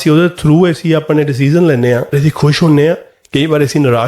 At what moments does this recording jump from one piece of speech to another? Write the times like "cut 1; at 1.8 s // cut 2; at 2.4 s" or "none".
cut 1; at 2.2 s